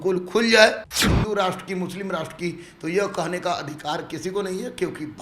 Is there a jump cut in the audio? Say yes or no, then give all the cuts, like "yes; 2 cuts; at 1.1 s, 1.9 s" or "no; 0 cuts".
yes; 1 cut; at 1.0 s